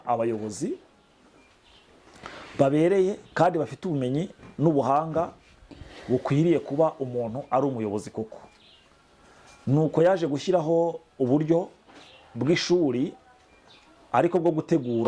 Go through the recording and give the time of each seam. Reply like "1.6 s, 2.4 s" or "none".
none